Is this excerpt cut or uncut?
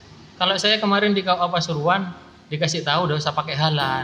uncut